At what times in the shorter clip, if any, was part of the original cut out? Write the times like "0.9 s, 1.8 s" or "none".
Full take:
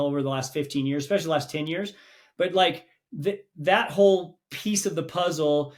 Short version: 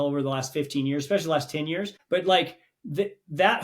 1.9 s